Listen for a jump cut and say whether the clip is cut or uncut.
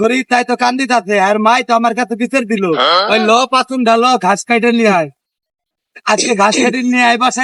uncut